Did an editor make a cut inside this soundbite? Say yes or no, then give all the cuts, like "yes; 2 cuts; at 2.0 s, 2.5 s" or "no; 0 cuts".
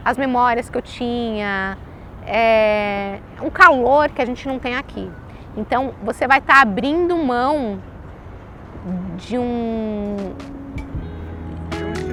no; 0 cuts